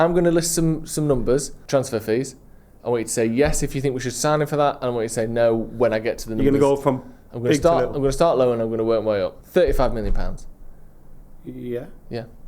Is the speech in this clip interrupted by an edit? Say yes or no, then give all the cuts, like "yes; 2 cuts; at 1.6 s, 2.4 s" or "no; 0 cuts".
yes; 2 cuts; at 1.6 s, 9.4 s